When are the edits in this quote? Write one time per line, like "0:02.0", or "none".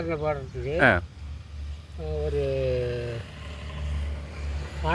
none